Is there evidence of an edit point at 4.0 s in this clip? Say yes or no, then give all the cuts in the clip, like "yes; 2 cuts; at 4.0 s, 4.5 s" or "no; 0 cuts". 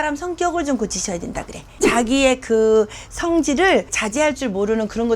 yes; 2 cuts; at 1.7 s, 4.0 s